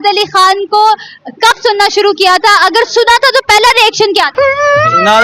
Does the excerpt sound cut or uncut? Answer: uncut